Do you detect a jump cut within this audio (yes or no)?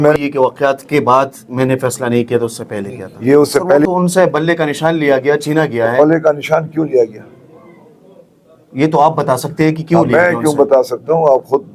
yes